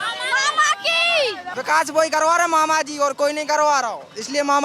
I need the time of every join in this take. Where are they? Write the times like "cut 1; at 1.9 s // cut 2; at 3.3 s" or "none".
cut 1; at 1.5 s